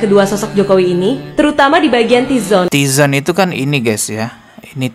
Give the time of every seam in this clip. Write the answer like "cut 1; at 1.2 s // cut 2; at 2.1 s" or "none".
cut 1; at 2.7 s

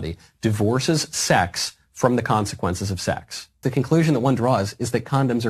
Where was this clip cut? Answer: cut 1; at 3.6 s

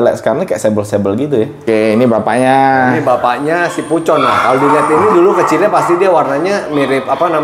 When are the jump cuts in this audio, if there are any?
cut 1; at 1.6 s

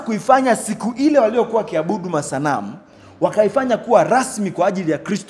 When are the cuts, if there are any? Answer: none

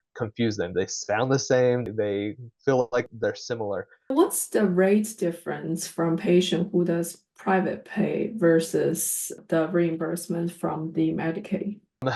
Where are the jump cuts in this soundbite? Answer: cut 1; at 4.1 s

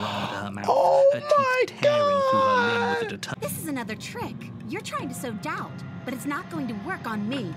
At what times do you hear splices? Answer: cut 1; at 3.2 s

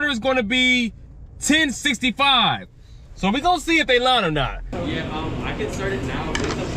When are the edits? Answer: cut 1; at 4.7 s

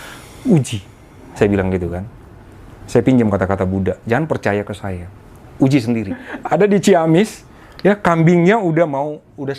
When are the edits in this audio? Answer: cut 1; at 6.3 s

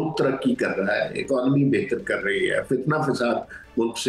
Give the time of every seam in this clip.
none

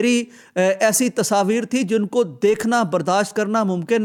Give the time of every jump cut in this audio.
none

